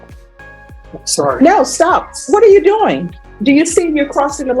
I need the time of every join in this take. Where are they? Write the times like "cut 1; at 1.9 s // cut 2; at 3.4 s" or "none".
cut 1; at 0.9 s